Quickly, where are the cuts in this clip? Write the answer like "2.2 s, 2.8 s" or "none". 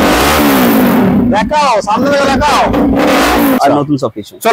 3.6 s